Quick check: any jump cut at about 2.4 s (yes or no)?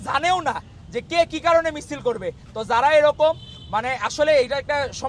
no